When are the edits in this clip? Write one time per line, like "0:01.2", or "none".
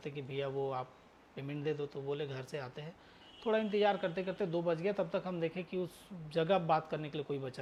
none